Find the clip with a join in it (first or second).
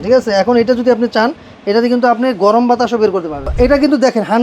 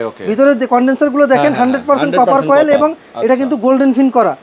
first